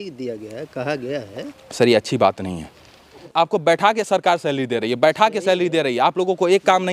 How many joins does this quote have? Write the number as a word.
two